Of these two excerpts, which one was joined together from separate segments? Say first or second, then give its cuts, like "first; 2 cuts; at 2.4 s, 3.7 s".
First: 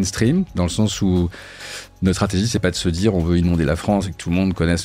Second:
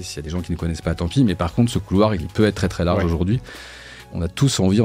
second; 2 cuts; at 2.2 s, 3.9 s